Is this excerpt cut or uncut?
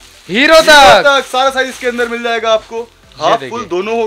uncut